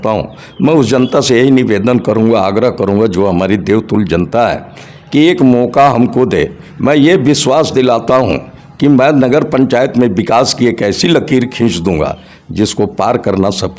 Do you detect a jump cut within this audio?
no; 0 cuts

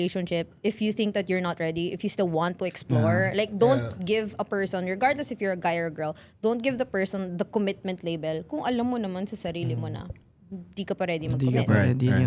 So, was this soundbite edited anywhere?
no; 0 cuts

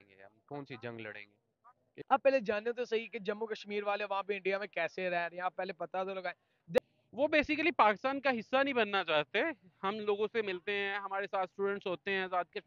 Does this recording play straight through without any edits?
no; 2 cuts; at 1.8 s, 6.8 s

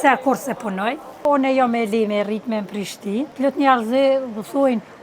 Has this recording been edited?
yes; 2 cuts; at 1.2 s, 3.3 s

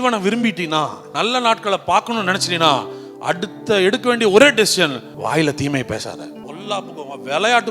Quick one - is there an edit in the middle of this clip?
yes; 3 cuts; at 1.0 s, 5.1 s, 6.4 s

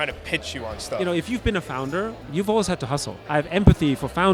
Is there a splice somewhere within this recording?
yes; 3 cuts; at 1.0 s, 2.2 s, 3.2 s

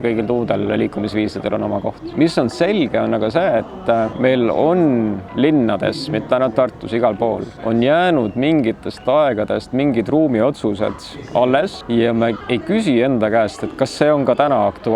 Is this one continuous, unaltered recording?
no; 5 cuts; at 2.0 s, 4.1 s, 7.5 s, 11.8 s, 12.6 s

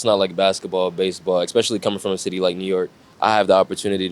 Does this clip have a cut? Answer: yes; 1 cut; at 3.0 s

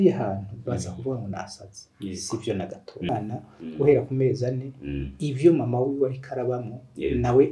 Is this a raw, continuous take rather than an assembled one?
no; 1 cut; at 3.1 s

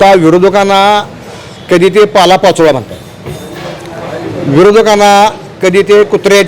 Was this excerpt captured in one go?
yes; 0 cuts

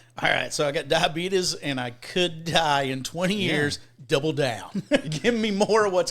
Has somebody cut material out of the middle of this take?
yes; 1 cut; at 5.0 s

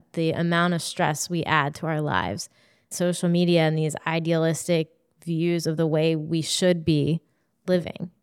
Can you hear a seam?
yes; 1 cut; at 2.9 s

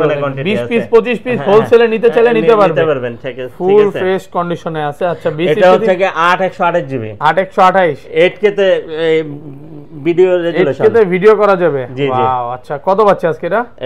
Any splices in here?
no; 0 cuts

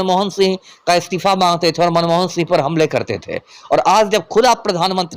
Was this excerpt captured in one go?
yes; 0 cuts

